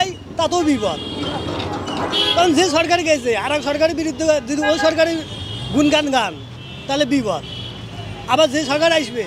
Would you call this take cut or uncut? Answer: uncut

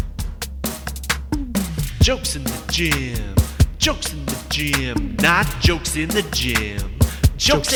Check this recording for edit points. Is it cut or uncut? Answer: uncut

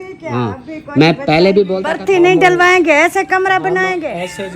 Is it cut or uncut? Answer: cut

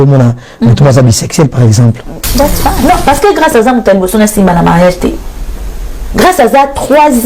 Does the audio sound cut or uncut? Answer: cut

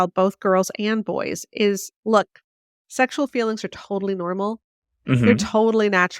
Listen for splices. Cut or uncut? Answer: cut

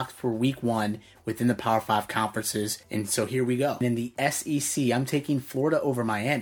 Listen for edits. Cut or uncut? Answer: cut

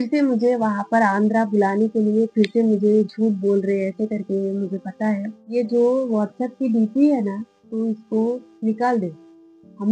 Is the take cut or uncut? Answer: cut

